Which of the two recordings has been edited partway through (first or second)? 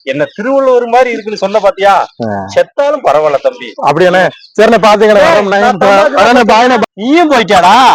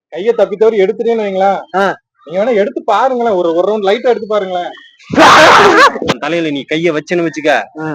second